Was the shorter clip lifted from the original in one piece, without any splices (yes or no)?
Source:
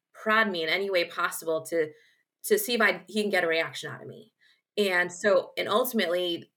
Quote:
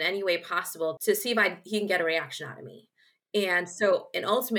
no